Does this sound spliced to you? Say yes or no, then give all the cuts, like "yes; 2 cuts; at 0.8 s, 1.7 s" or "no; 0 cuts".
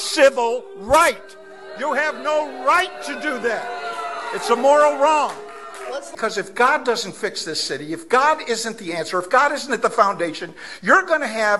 yes; 1 cut; at 6.1 s